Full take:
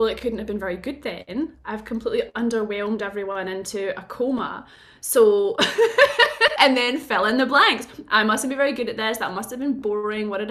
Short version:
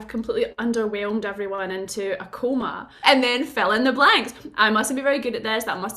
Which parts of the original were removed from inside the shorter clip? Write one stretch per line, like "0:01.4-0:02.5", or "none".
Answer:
0:04.8-0:06.5